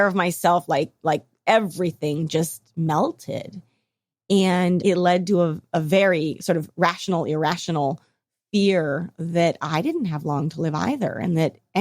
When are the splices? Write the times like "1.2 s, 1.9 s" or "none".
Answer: 4.8 s